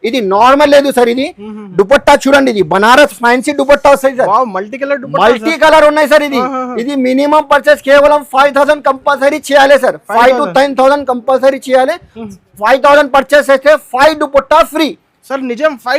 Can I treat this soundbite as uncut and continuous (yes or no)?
yes